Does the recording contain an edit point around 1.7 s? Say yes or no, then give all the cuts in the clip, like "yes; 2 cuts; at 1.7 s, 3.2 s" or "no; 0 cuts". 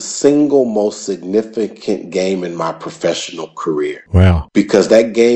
no; 1 cut; at 4.2 s